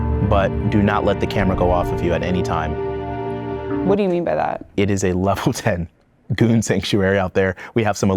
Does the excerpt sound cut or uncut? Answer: uncut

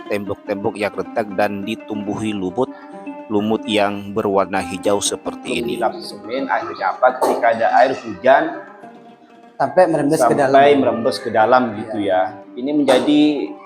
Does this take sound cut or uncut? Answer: uncut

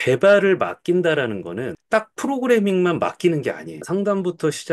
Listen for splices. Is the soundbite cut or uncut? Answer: cut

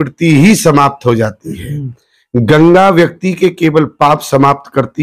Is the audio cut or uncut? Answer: uncut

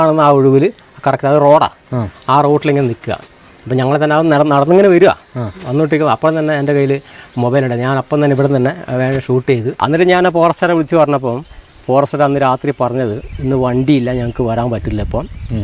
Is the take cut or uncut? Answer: cut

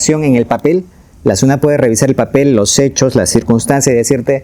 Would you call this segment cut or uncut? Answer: uncut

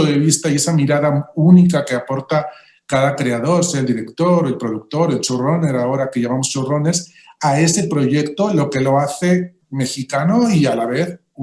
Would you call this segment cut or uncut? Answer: cut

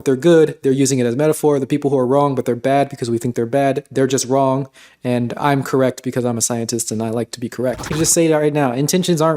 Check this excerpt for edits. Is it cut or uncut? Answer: cut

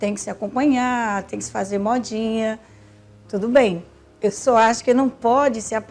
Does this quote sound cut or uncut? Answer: uncut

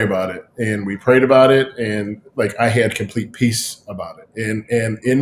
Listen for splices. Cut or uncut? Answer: uncut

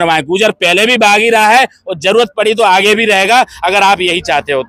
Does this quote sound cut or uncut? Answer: uncut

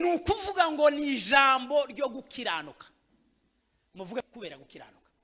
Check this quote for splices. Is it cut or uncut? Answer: cut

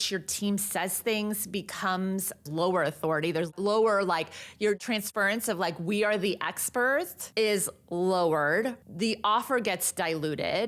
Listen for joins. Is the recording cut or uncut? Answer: cut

